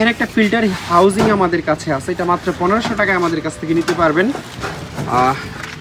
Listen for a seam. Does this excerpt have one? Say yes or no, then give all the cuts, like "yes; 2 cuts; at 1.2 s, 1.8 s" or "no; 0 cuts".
no; 0 cuts